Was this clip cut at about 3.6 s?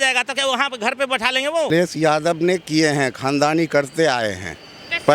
no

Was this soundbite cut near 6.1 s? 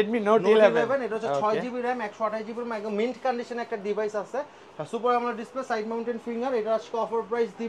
no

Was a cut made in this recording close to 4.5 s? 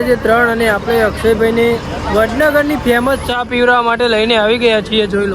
no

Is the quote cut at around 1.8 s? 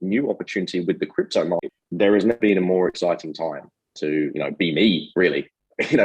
yes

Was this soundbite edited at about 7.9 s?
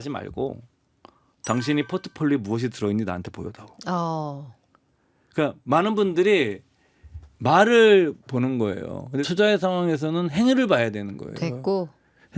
no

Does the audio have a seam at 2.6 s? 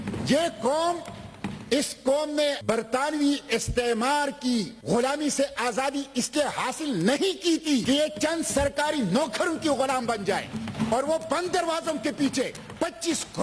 yes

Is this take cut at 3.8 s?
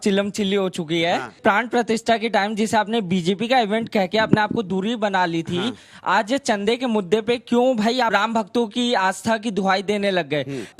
no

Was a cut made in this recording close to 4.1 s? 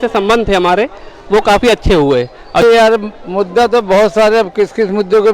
no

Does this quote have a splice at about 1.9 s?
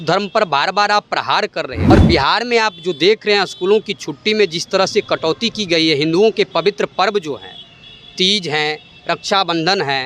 yes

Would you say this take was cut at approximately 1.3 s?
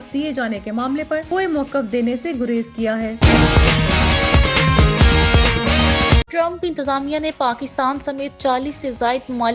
no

